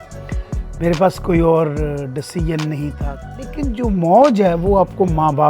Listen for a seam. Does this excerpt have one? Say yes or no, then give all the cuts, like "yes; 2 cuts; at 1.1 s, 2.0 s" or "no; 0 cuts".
yes; 1 cut; at 3.5 s